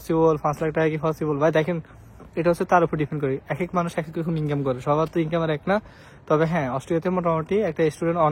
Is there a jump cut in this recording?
no; 0 cuts

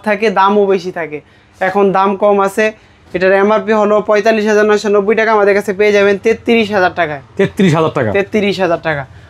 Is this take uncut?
yes; 0 cuts

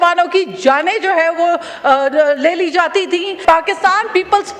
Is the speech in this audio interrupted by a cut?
yes; 1 cut; at 3.3 s

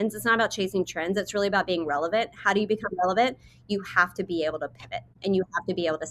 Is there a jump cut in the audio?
yes; 1 cut; at 5.1 s

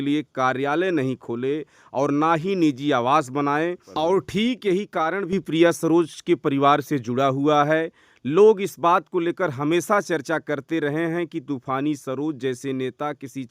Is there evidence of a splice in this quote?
yes; 1 cut; at 3.9 s

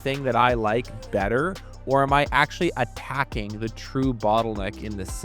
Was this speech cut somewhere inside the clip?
no; 0 cuts

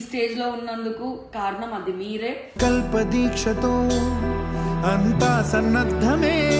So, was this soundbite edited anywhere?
no; 0 cuts

